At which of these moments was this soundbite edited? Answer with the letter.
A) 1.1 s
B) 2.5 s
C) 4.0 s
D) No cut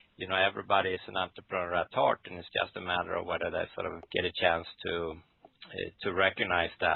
C